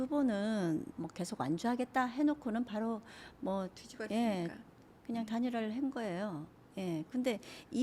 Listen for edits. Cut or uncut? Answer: cut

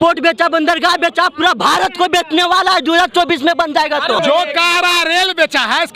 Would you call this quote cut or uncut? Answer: cut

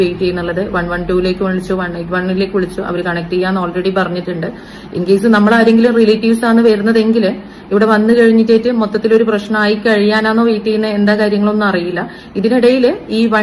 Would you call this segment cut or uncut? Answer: uncut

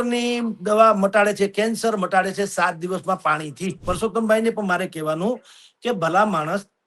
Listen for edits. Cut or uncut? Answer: cut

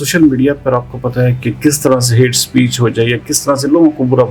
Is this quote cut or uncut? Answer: uncut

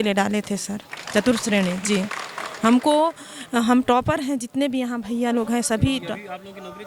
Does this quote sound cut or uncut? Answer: uncut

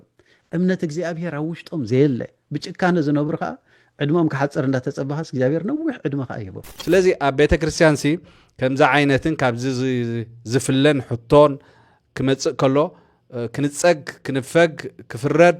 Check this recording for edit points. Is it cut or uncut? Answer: cut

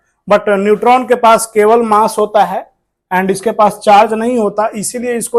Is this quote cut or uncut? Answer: uncut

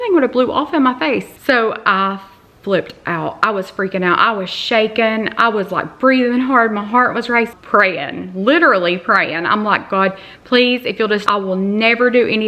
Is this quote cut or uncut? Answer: cut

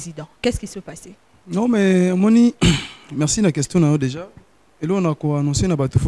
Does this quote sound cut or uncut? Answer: uncut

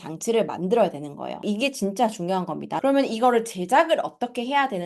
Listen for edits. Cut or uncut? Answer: cut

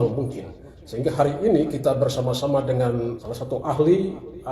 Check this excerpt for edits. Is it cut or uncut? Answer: cut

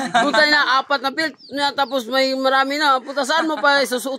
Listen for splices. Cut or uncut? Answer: uncut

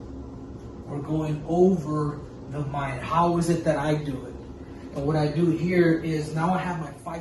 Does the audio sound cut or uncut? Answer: uncut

